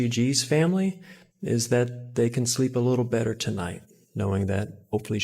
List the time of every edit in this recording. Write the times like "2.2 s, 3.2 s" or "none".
none